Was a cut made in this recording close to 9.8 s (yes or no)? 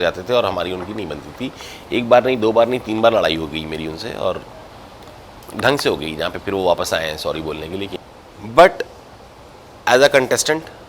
no